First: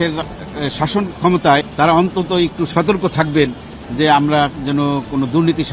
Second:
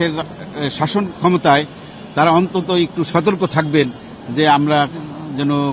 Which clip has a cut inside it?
first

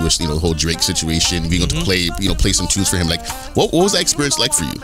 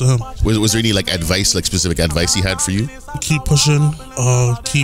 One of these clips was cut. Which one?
second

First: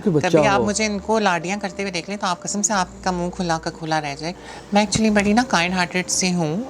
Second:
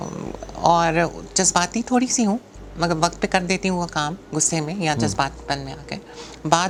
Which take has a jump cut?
first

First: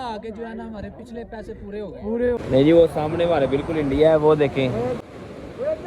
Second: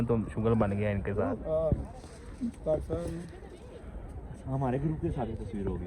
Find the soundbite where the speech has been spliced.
first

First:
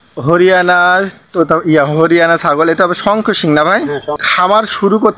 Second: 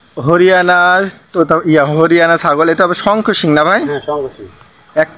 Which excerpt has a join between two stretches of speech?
first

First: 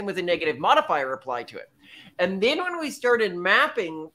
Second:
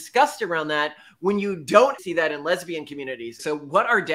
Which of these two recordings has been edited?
second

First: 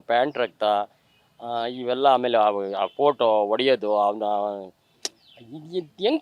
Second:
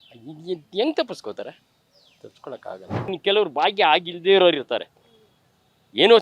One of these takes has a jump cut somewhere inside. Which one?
second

